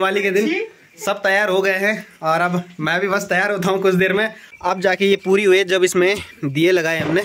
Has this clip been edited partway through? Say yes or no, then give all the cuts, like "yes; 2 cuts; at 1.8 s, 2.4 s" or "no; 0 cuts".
yes; 1 cut; at 4.9 s